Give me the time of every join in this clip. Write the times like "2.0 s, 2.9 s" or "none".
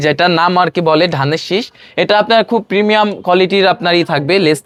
none